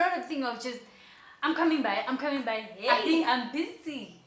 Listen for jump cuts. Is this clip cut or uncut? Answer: uncut